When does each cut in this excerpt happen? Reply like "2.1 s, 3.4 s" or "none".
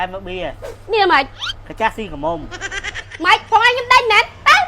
3.0 s